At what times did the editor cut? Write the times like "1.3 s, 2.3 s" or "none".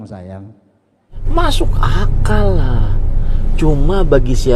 1.2 s